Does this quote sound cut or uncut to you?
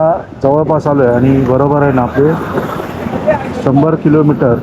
uncut